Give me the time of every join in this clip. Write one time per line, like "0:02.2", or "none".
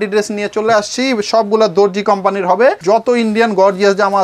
0:02.8